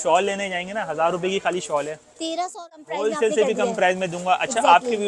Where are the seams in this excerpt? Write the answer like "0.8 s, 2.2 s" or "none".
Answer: 2.5 s